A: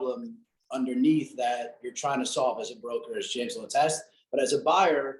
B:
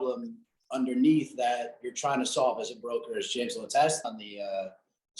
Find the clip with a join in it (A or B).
B